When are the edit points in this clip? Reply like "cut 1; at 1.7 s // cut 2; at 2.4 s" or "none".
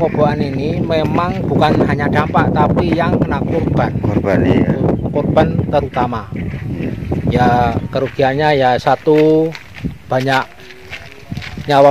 none